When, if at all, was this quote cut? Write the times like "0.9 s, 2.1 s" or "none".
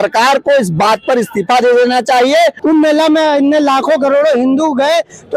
2.6 s